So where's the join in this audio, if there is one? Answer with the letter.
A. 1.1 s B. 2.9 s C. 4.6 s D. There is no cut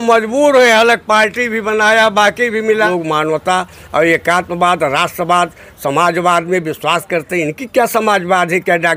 B